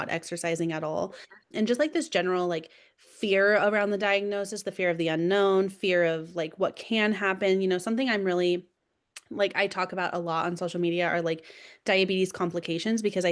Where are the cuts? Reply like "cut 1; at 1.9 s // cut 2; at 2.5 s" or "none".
cut 1; at 1.5 s